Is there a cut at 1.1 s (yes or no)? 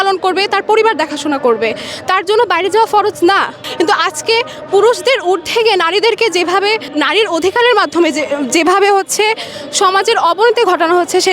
no